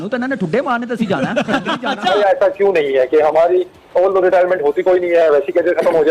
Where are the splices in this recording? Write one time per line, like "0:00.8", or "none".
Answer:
0:02.1

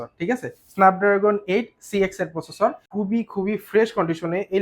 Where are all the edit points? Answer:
0:02.8

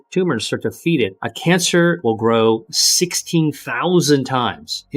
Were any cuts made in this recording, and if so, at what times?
0:01.3
0:02.0
0:03.7

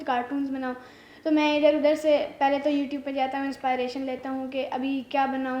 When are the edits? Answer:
none

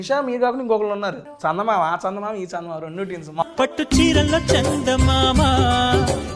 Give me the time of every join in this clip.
0:01.3
0:03.4

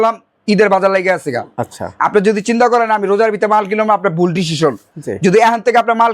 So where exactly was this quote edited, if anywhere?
none

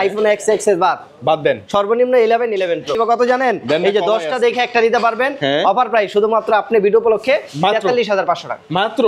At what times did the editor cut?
0:02.9

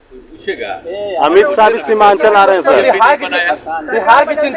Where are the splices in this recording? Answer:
none

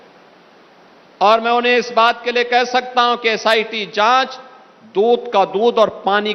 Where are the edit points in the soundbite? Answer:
none

